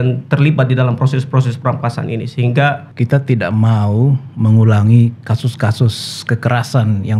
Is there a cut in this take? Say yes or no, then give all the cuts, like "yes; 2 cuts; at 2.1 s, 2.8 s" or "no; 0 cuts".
yes; 1 cut; at 2.9 s